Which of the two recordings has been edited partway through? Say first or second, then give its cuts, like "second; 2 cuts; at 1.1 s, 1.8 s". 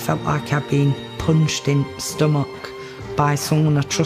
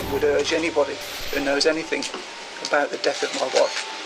second; 1 cut; at 1.1 s